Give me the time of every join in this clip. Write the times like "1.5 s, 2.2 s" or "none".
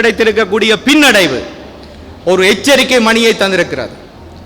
none